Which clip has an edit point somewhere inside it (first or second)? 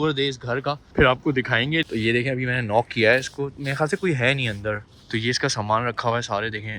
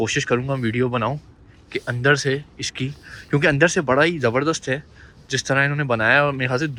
first